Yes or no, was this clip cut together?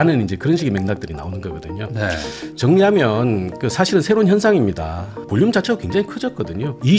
yes